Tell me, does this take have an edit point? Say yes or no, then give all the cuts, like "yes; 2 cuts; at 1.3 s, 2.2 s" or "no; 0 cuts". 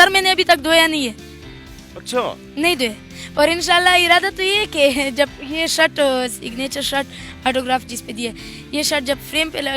no; 0 cuts